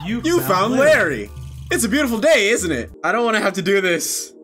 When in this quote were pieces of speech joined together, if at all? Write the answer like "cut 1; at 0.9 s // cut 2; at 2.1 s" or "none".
cut 1; at 2.9 s